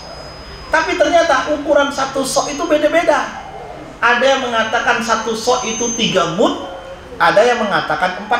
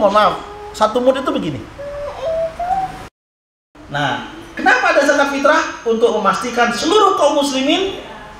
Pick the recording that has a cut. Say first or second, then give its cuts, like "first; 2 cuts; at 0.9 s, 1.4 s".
second; 1 cut; at 3.3 s